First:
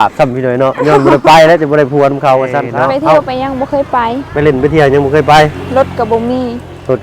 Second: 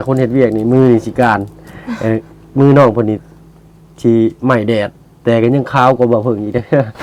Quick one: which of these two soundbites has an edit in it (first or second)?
first